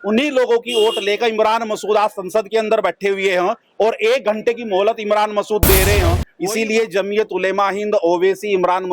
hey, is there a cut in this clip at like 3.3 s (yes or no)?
no